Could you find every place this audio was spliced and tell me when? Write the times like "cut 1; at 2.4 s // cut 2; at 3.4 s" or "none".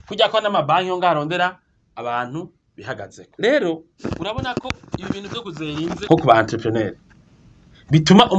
cut 1; at 3.2 s // cut 2; at 3.9 s // cut 3; at 6.0 s